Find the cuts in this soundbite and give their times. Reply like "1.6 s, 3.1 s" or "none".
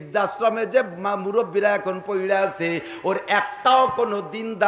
none